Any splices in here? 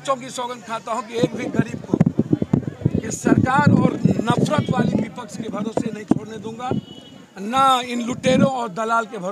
no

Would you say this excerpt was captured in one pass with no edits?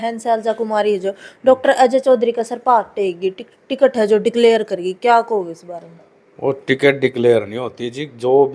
yes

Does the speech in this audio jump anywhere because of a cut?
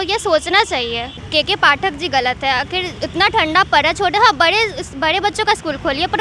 yes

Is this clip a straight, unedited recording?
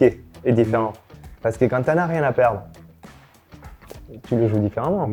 yes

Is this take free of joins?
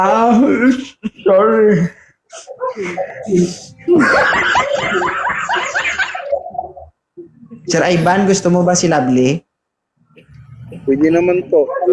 yes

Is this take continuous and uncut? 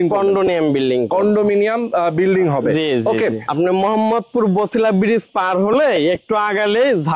no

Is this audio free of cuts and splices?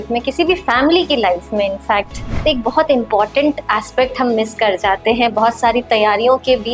no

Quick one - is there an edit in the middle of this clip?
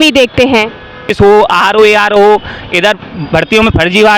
yes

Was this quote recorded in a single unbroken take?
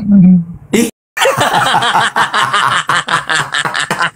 no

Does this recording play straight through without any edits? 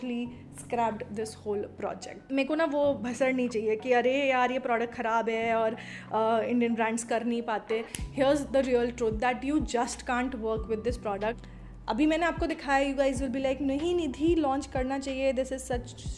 no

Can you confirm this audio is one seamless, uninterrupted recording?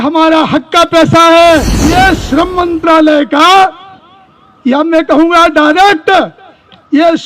no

